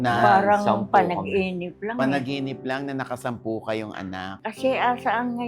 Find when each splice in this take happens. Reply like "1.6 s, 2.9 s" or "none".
4.3 s